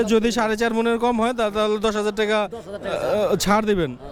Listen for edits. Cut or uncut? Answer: uncut